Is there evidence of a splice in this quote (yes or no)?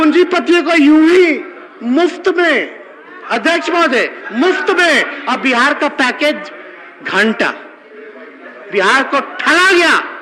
no